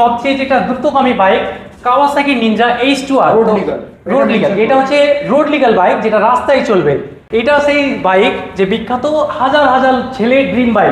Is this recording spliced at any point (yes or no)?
no